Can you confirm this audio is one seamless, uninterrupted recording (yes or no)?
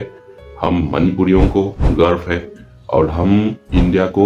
yes